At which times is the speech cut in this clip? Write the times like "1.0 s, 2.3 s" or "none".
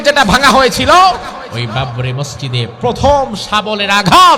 1.5 s